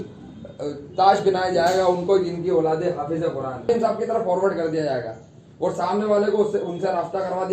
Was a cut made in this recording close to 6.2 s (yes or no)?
no